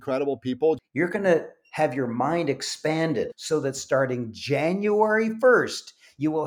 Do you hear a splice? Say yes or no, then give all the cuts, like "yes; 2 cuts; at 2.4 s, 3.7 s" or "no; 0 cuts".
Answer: yes; 2 cuts; at 0.8 s, 3.4 s